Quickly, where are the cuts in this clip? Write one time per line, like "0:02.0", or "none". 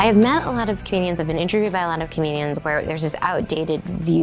none